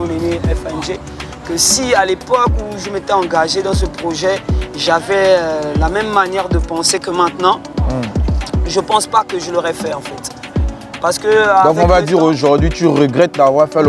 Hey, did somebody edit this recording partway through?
no; 0 cuts

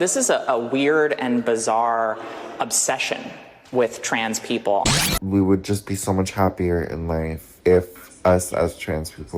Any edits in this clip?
yes; 1 cut; at 4.9 s

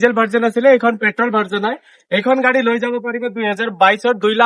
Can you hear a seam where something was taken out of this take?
no; 0 cuts

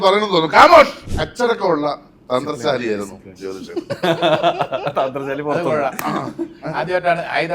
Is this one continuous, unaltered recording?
no; 1 cut; at 1.0 s

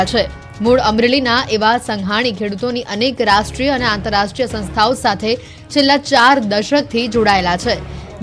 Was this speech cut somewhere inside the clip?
no; 0 cuts

